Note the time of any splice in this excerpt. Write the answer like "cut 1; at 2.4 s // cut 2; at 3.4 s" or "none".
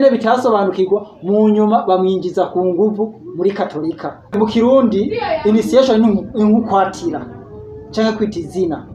cut 1; at 4.4 s

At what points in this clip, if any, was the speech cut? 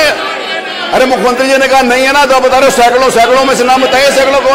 none

